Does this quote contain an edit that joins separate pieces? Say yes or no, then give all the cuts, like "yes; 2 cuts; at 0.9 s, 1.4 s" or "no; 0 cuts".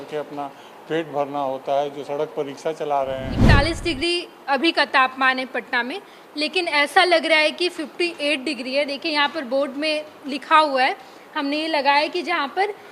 yes; 1 cut; at 3.6 s